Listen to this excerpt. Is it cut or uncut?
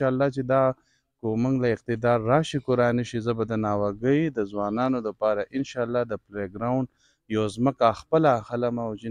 uncut